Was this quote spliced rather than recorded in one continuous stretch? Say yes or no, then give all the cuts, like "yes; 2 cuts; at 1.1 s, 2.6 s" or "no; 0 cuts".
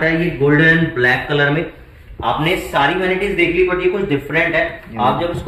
no; 0 cuts